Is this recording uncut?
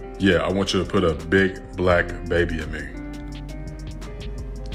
yes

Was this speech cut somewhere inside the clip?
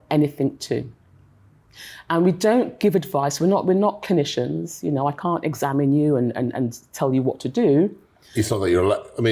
no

